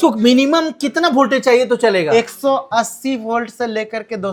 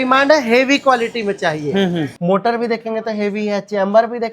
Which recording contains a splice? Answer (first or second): second